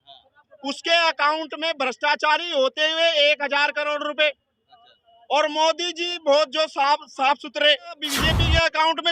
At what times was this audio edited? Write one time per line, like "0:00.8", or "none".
0:08.1